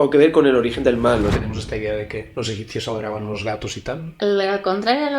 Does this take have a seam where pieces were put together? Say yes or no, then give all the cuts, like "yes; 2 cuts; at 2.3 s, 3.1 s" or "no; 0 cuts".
yes; 3 cuts; at 1.4 s, 2.3 s, 4.1 s